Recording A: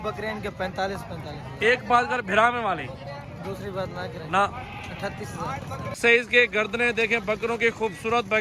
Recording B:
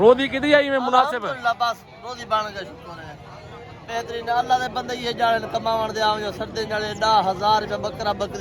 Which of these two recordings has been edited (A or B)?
A